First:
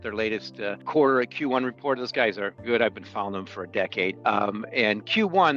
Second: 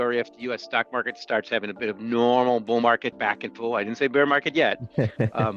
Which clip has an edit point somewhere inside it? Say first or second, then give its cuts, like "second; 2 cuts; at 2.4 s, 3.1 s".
first; 3 cuts; at 0.8 s, 2.6 s, 4.2 s